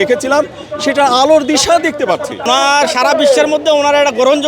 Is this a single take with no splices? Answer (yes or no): no